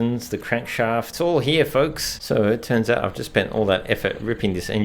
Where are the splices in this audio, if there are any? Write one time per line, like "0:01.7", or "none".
0:01.1
0:02.2